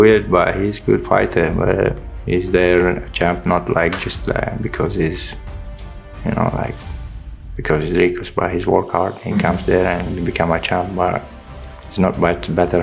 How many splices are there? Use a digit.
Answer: 0